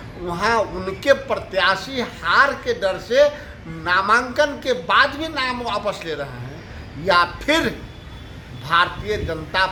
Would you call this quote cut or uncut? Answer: uncut